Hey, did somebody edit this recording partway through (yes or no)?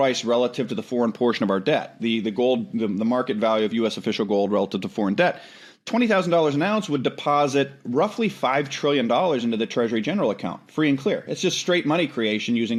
no